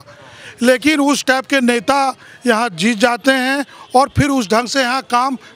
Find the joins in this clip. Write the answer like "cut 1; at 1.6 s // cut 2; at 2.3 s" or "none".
none

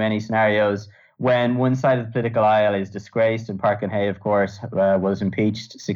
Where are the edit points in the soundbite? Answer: none

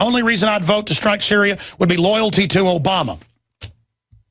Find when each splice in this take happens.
none

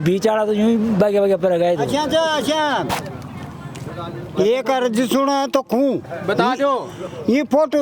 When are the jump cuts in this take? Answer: none

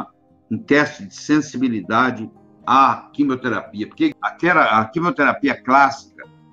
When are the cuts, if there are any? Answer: cut 1; at 4.1 s

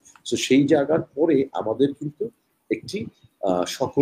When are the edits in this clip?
none

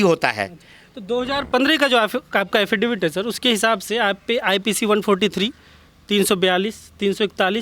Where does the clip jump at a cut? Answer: none

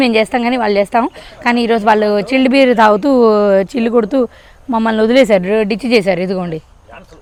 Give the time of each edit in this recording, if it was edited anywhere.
none

